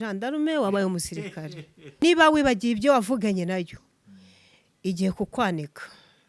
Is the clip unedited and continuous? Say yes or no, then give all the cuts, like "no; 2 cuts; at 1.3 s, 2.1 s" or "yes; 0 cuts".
no; 1 cut; at 2.0 s